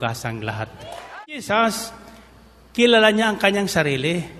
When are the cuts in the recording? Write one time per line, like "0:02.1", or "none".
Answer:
0:01.2